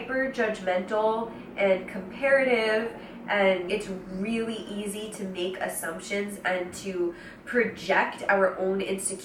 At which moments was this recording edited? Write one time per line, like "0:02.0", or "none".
none